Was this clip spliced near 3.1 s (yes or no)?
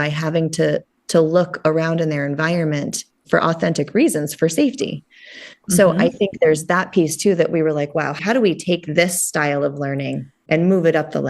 no